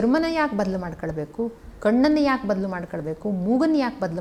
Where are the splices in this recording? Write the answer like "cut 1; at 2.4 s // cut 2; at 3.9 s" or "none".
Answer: none